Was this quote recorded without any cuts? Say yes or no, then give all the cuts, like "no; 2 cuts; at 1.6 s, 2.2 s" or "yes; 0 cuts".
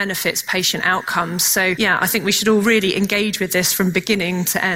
no; 1 cut; at 1.8 s